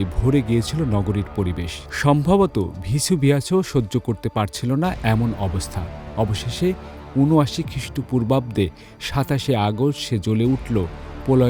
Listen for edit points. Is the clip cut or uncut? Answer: uncut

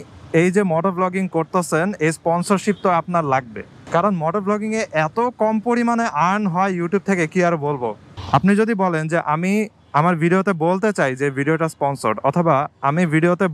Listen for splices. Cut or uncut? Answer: cut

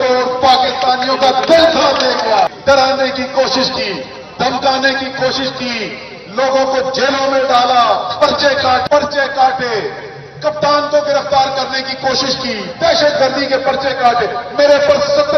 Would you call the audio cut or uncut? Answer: cut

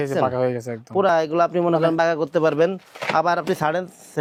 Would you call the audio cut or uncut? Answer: uncut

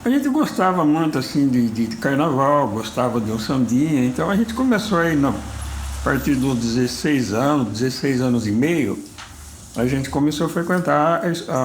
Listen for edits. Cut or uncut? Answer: uncut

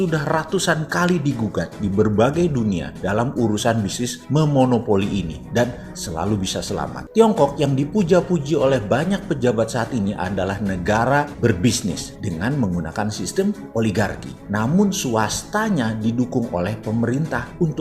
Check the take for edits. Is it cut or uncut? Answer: cut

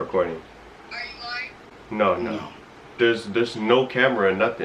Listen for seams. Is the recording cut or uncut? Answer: cut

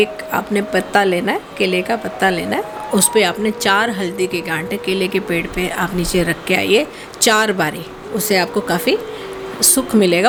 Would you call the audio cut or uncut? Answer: uncut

